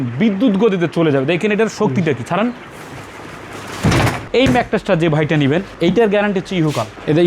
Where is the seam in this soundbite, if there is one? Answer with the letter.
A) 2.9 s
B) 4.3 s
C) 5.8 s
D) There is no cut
B